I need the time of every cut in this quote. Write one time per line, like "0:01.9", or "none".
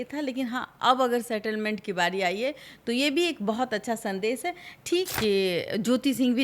0:05.1